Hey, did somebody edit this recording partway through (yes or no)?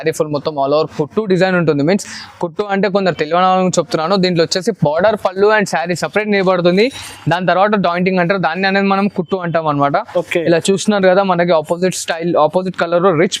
no